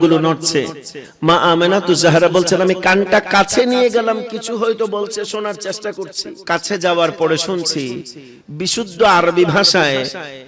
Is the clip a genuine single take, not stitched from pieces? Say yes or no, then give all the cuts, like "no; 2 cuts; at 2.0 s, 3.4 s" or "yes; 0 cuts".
no; 1 cut; at 6.3 s